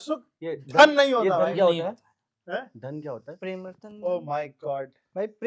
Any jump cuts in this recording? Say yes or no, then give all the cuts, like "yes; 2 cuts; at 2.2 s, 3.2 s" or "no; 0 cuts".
no; 0 cuts